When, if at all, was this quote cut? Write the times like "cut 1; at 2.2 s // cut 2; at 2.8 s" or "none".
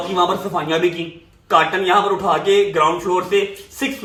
none